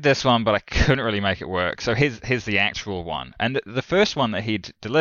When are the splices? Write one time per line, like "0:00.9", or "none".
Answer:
none